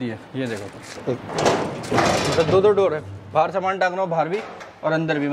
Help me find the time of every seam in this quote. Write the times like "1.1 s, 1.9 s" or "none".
none